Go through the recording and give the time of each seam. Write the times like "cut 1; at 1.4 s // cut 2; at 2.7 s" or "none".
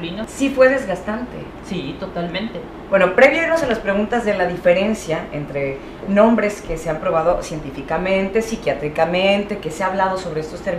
cut 1; at 6.8 s

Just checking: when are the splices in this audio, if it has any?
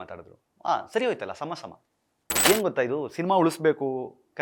cut 1; at 2.4 s

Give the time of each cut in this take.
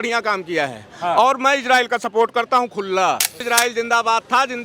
cut 1; at 3.5 s

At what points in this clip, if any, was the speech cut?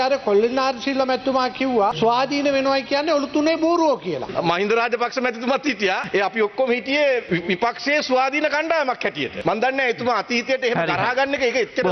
cut 1; at 1.9 s // cut 2; at 4.2 s // cut 3; at 6.0 s // cut 4; at 7.2 s // cut 5; at 9.3 s

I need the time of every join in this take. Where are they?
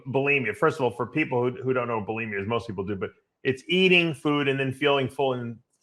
none

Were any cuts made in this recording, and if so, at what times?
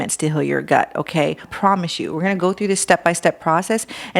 cut 1; at 1.5 s

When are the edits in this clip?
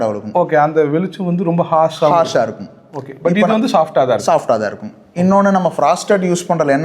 none

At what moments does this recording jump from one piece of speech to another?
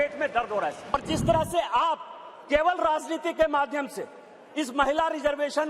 cut 1; at 0.9 s

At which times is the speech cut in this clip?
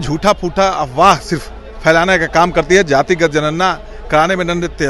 none

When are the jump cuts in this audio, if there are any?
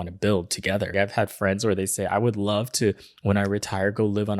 cut 1; at 0.9 s

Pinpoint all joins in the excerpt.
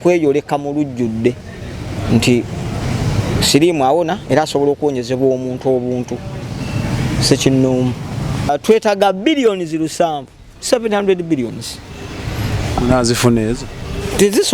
cut 1; at 8.5 s

